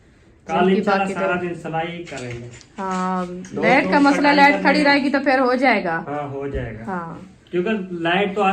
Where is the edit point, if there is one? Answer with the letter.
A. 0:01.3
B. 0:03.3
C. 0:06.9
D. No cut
D